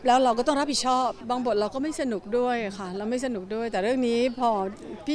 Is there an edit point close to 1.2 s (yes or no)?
yes